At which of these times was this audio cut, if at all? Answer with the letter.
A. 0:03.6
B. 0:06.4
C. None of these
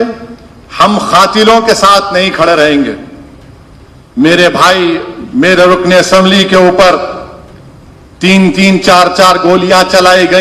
C